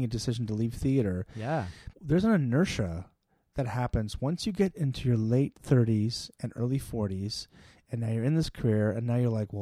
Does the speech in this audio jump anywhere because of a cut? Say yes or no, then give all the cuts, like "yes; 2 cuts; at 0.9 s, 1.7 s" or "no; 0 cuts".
no; 0 cuts